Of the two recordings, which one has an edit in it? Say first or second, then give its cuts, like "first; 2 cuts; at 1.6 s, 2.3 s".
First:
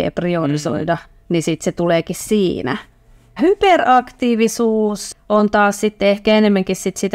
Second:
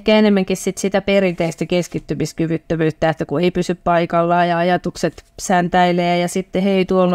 first; 2 cuts; at 3.4 s, 5.1 s